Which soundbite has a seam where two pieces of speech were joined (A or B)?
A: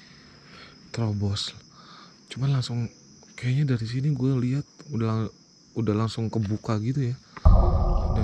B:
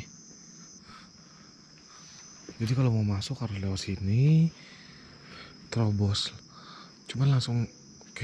A